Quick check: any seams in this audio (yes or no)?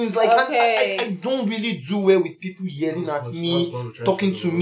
no